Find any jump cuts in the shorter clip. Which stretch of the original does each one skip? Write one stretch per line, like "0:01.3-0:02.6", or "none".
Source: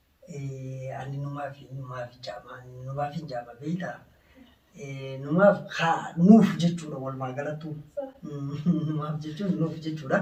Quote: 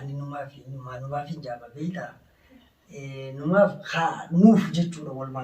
0:02.0-0:02.9